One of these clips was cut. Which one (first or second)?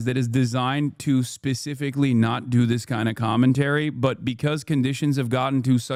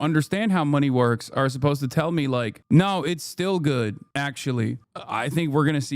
second